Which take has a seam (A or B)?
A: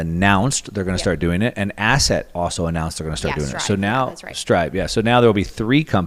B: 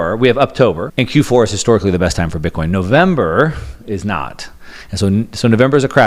B